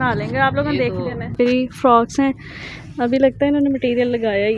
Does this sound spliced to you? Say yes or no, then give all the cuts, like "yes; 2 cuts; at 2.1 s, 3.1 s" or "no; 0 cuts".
yes; 1 cut; at 1.3 s